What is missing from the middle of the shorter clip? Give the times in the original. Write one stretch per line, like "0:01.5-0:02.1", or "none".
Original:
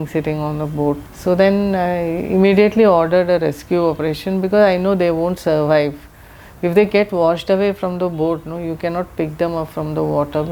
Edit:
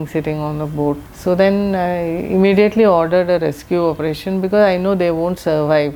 none

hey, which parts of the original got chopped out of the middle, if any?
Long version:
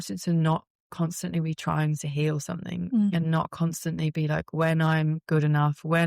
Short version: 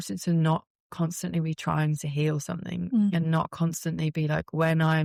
none

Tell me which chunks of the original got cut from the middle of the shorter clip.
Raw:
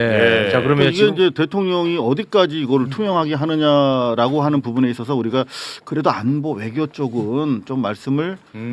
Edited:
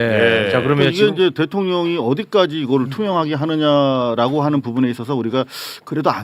none

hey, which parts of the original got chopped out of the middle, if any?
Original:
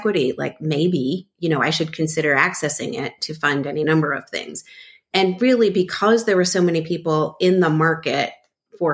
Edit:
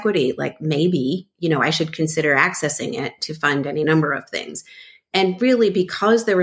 none

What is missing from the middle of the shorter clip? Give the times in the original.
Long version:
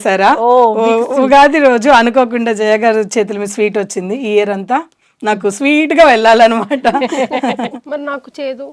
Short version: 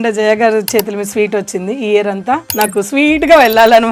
0:04.9-0:05.2

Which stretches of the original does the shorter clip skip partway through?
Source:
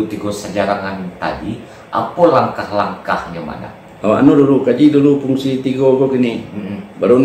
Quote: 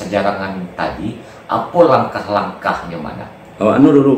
none

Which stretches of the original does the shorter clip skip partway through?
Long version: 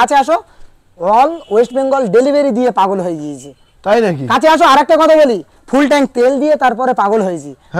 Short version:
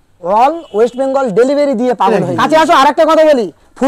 0:03.0-0:04.2

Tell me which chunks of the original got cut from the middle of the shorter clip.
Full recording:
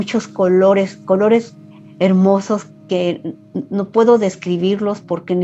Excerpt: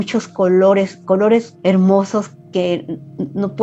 0:01.5-0:01.9

